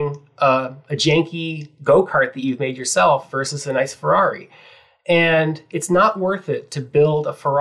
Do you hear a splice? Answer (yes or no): no